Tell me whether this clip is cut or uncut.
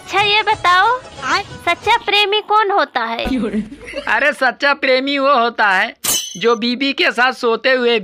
uncut